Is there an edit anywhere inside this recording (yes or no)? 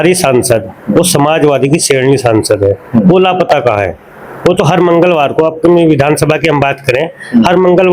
no